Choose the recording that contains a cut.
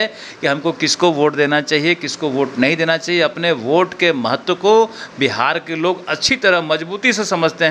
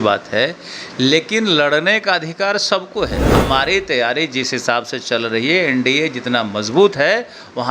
second; 1 cut; at 3.3 s

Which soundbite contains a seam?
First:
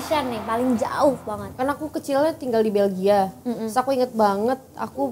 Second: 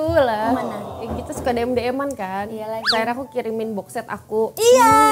first; 1 cut; at 1.4 s

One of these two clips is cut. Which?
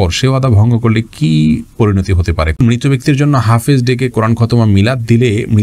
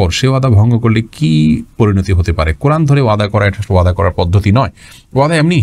first; 1 cut; at 2.6 s

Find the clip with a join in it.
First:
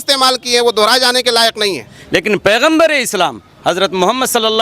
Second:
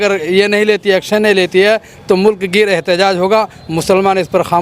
first; 1 cut; at 1.9 s

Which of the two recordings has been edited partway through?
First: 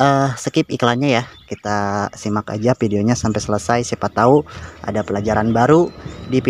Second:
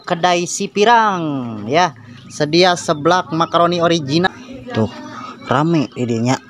second; 1 cut; at 4.3 s

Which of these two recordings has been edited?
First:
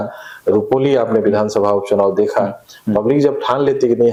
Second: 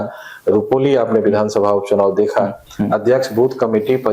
second; 1 cut; at 2.6 s

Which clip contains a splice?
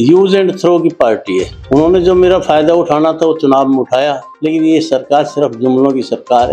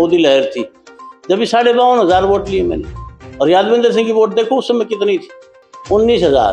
first; 2 cuts; at 1.5 s, 4.3 s

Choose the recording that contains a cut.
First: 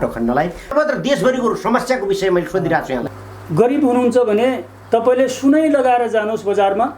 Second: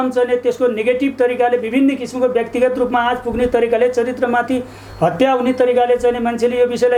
first; 2 cuts; at 0.7 s, 3.1 s

